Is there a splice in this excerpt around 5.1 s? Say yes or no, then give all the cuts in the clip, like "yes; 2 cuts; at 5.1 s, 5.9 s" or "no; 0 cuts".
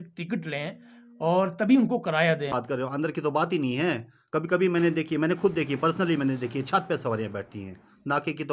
no; 1 cut; at 2.6 s